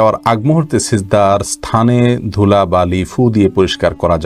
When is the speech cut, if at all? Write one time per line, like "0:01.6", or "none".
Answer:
none